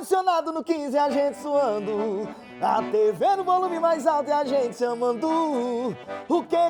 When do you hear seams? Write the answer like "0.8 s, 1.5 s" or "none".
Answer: none